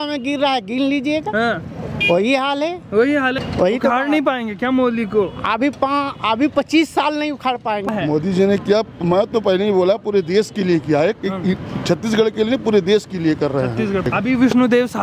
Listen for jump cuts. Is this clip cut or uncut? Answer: cut